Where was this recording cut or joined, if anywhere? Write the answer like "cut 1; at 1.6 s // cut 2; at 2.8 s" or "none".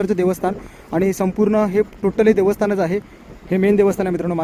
none